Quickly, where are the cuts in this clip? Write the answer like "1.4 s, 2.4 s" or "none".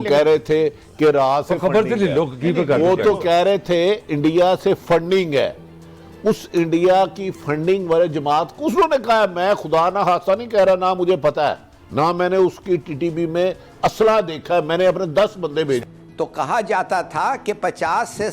15.8 s